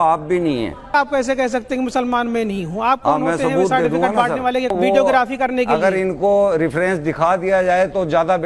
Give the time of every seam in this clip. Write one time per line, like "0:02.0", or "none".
0:00.9
0:04.7